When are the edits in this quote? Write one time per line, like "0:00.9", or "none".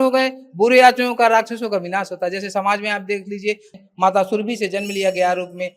0:03.7